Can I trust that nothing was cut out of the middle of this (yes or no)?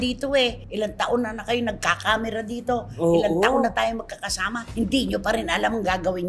yes